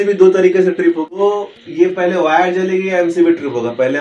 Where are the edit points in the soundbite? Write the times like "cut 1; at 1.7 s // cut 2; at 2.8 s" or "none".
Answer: cut 1; at 1.2 s